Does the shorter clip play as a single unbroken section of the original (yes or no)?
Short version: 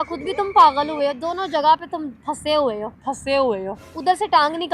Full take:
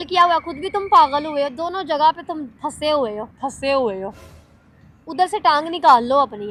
no